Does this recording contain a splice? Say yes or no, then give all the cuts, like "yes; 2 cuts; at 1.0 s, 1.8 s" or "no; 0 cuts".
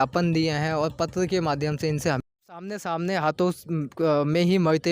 yes; 1 cut; at 2.3 s